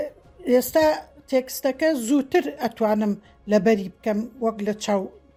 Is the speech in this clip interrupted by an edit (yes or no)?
no